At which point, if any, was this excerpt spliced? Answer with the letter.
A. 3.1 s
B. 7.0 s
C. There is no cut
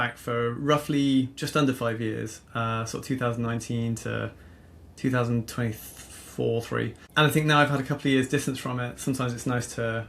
B